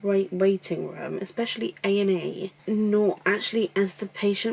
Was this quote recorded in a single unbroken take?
yes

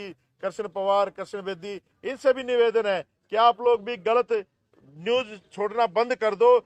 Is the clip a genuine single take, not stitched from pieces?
yes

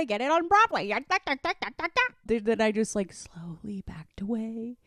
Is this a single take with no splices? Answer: no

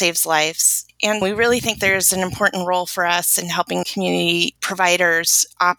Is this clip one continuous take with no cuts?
no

